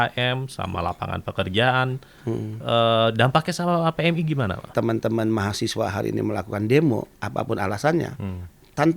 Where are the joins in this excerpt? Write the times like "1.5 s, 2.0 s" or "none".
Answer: 4.7 s

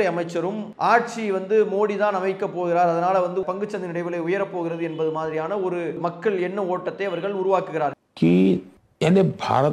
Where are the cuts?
8.0 s

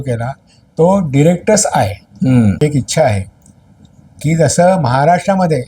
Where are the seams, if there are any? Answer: 2.6 s

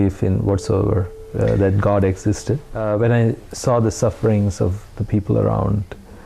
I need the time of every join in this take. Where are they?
2.7 s

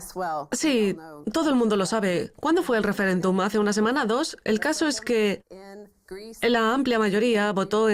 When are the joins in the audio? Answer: none

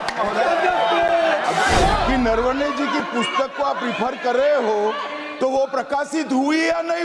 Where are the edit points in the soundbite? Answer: 2.0 s

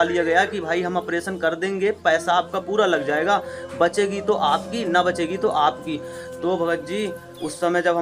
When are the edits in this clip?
none

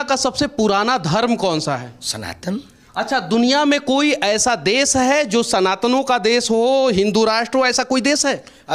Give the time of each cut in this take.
none

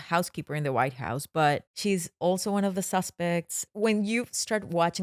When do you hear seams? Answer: 1.7 s, 3.6 s

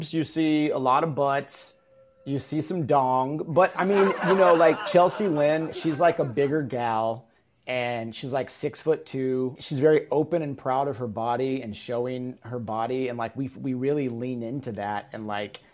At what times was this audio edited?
5.7 s, 9.6 s

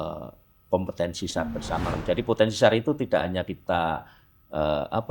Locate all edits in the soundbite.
2.0 s

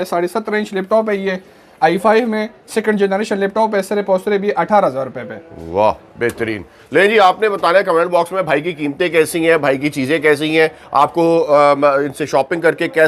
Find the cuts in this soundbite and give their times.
none

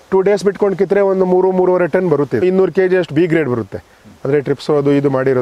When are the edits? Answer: 2.4 s

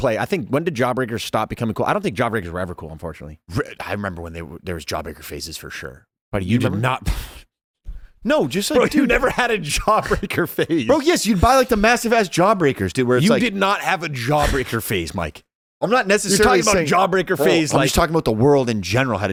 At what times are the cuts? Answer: none

